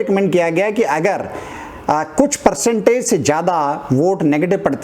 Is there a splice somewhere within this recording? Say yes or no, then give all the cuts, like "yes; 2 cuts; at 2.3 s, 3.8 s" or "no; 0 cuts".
no; 0 cuts